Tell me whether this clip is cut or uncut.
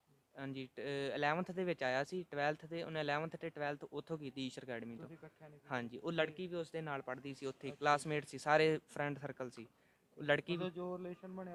uncut